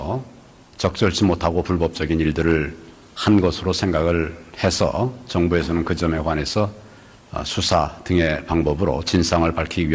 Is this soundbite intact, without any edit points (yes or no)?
no